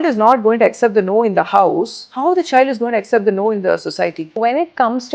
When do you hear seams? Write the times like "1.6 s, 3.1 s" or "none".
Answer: 2.0 s, 4.2 s